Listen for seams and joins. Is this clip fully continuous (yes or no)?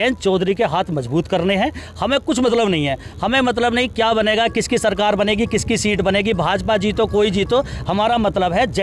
yes